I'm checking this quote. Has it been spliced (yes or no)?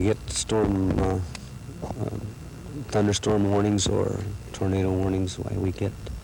no